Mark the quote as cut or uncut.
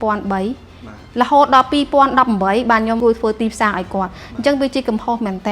cut